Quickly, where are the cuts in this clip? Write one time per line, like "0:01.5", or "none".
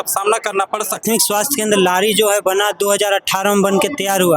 0:00.9